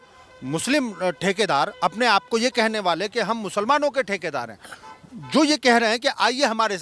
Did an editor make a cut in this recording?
no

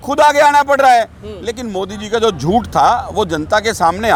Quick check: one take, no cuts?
yes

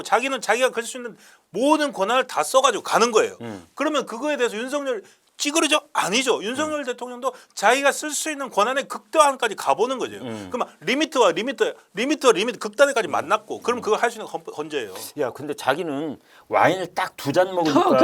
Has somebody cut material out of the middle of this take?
no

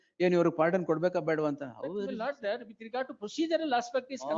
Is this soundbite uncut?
yes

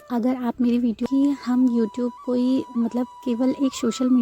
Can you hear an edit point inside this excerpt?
yes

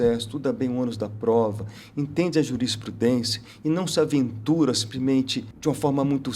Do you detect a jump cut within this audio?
yes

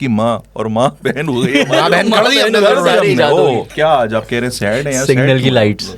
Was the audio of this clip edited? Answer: yes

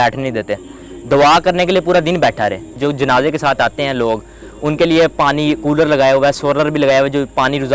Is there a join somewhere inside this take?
yes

